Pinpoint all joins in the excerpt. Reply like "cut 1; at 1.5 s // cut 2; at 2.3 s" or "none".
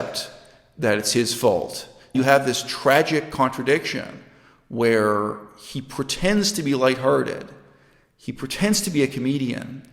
cut 1; at 2.1 s

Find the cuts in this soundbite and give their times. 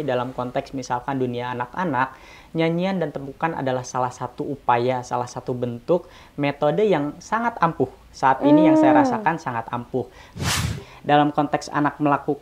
cut 1; at 10.7 s

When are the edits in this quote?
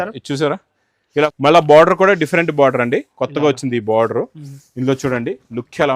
cut 1; at 1.3 s

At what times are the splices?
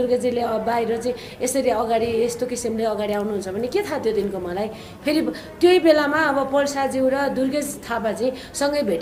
none

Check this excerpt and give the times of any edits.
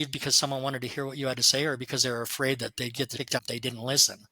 cut 1; at 3.3 s

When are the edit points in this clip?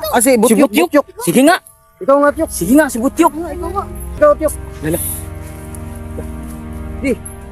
cut 1; at 4.1 s

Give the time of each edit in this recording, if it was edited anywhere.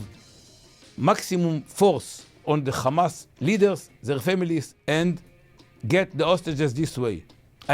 cut 1; at 2.4 s // cut 2; at 4.7 s

